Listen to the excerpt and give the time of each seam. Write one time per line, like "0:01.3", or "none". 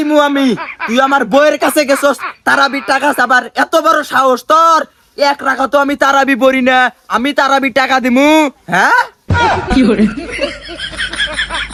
none

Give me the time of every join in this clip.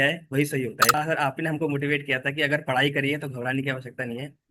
0:01.0

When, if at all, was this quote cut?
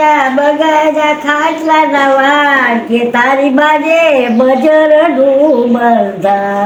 none

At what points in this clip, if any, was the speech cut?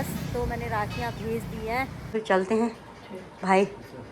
0:02.2

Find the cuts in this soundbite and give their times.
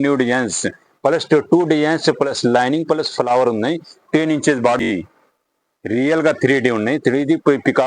0:04.9

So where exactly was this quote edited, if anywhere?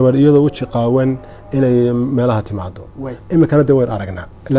none

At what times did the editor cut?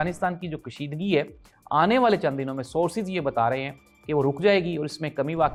none

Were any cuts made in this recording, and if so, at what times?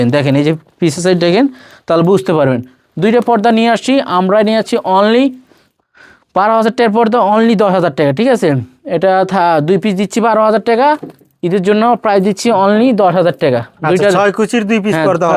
none

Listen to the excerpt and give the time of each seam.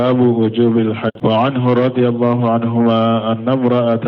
0:01.1

